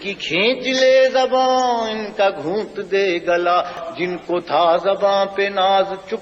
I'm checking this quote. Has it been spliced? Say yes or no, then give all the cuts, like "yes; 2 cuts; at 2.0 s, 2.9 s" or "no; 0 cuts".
yes; 1 cut; at 3.8 s